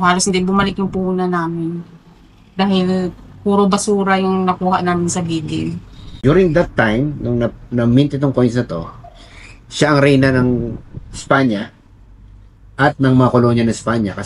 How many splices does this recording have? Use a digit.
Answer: 1